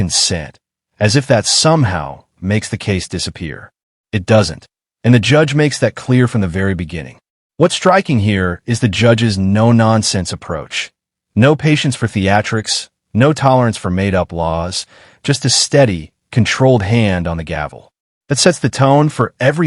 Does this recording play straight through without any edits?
yes; 0 cuts

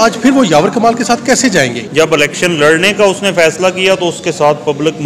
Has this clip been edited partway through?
yes; 1 cut; at 1.8 s

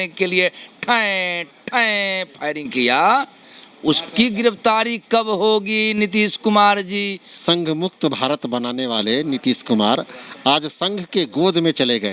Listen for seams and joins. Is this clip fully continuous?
no; 1 cut; at 7.3 s

